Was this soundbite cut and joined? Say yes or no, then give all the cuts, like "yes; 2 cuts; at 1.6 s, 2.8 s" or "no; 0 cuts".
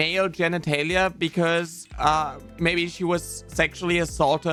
no; 0 cuts